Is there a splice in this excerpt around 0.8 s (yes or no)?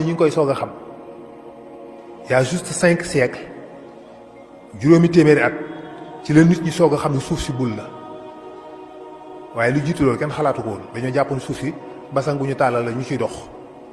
yes